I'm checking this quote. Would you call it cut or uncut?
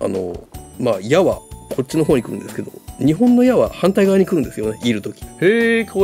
cut